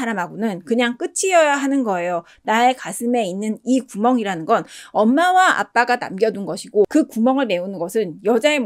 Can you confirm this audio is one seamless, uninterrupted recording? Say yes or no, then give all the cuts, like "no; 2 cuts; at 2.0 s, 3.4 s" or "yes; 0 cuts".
yes; 0 cuts